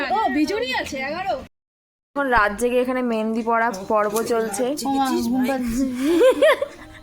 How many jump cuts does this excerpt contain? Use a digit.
1